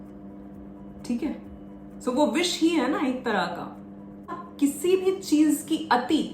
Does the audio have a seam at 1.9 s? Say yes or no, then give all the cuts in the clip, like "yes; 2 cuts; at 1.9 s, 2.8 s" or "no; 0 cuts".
no; 1 cut; at 4.4 s